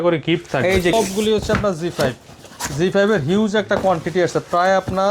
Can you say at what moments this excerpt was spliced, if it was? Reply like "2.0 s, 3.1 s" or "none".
0.9 s